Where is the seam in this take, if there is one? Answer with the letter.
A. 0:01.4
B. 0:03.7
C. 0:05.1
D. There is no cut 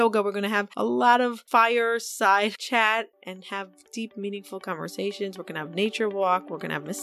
A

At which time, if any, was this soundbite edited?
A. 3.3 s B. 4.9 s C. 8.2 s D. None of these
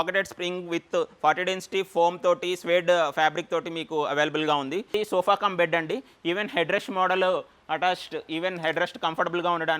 B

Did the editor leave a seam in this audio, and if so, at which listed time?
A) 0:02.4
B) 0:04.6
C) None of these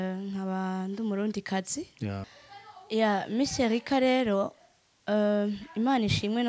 A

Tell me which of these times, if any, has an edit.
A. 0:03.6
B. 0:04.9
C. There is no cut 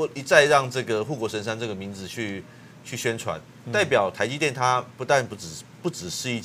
C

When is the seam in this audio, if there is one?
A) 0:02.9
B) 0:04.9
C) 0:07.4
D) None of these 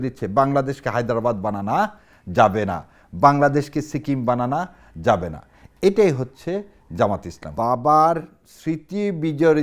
C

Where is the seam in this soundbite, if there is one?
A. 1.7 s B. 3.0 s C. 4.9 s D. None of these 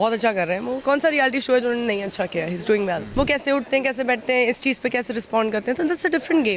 B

